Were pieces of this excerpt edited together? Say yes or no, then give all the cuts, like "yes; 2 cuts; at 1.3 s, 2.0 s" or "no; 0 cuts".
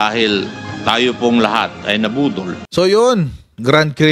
yes; 1 cut; at 2.5 s